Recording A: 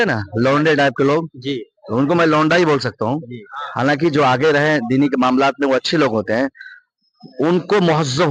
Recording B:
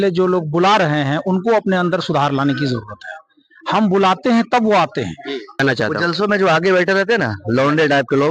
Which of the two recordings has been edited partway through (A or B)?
B